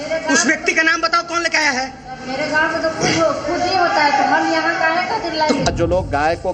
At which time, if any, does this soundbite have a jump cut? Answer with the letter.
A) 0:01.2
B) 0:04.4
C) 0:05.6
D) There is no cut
C